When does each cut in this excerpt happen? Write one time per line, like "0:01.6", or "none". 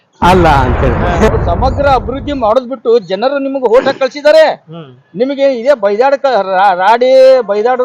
0:01.3

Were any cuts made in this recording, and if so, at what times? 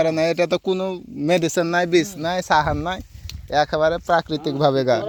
none

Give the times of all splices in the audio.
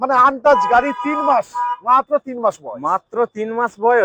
none

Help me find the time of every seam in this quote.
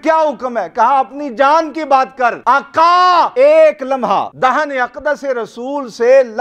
0:02.4
0:03.3
0:04.3

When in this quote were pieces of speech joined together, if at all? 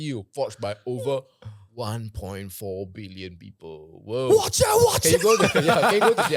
none

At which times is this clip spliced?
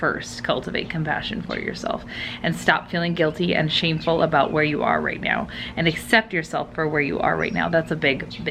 none

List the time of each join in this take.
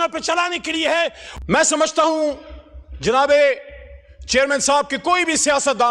0:01.2

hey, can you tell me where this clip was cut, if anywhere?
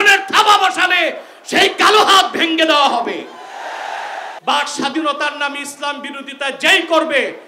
0:04.3

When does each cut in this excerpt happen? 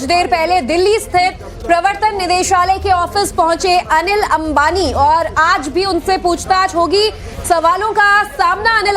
0:01.1

